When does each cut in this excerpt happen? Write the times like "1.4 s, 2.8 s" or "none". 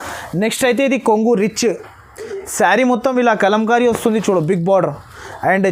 none